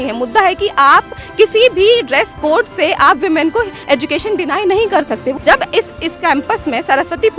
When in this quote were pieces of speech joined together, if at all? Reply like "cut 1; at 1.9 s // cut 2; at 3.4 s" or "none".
cut 1; at 5.4 s